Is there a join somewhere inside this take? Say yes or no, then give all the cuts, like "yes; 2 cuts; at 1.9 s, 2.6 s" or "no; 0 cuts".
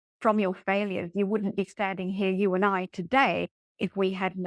no; 0 cuts